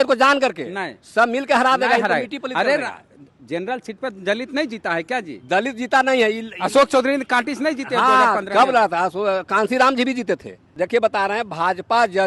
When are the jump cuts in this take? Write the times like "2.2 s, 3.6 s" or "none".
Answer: none